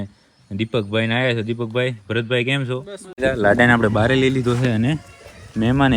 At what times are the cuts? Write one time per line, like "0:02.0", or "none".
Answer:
0:03.2